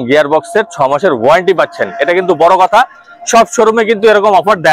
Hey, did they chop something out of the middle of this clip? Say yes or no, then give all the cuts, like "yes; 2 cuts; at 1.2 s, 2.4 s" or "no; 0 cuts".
no; 0 cuts